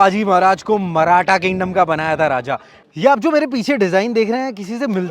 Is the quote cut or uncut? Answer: cut